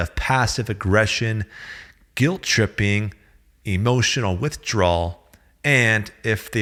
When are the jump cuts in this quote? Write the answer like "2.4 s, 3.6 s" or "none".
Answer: none

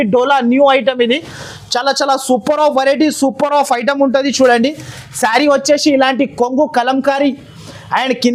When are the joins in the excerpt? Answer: none

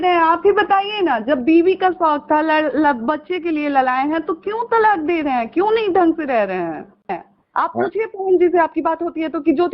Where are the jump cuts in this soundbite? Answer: 7.1 s

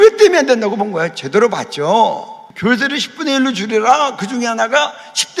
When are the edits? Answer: none

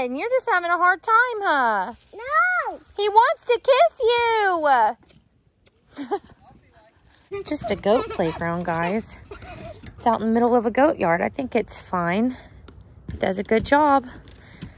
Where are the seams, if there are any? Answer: 7.4 s

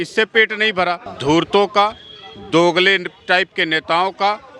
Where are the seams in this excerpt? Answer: 1.1 s

